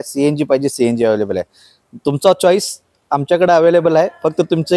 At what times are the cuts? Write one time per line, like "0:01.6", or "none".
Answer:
none